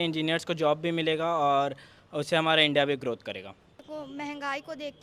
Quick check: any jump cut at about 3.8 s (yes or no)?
yes